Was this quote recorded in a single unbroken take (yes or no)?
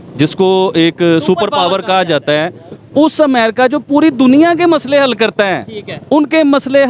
yes